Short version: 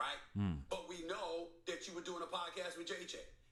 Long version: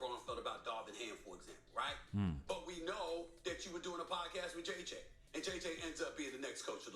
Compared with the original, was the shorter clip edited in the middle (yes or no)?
no